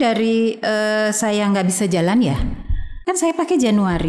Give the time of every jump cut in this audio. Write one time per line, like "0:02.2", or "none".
0:03.0